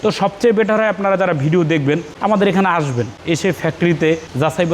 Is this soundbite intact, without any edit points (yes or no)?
yes